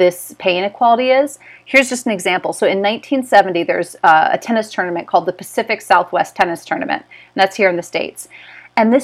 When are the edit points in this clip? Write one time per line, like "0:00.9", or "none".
none